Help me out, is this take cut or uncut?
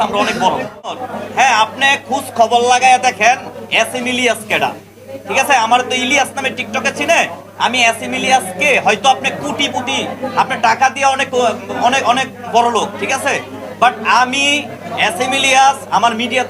cut